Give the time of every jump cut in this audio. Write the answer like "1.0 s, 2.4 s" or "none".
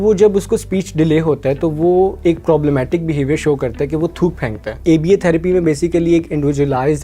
4.7 s